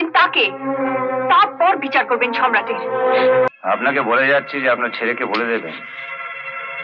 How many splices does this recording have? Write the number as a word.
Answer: one